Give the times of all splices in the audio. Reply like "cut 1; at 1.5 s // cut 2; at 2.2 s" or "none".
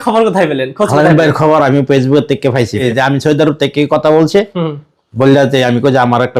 cut 1; at 2.8 s